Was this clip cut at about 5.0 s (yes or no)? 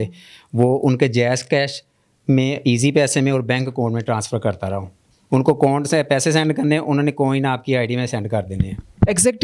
no